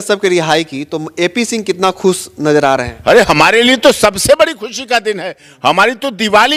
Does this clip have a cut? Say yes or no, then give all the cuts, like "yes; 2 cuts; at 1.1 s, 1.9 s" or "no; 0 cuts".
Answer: no; 0 cuts